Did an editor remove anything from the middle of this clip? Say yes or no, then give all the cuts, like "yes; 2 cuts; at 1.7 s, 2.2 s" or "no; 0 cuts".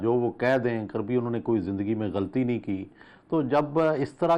no; 0 cuts